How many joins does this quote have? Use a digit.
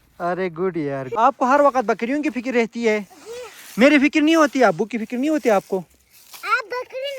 1